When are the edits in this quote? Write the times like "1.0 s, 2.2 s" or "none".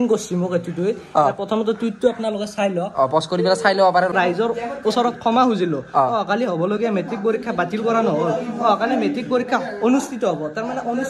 4.1 s